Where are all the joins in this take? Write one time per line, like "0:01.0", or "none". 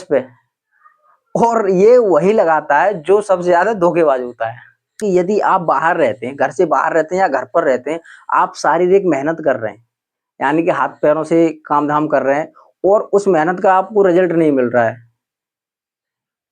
0:05.0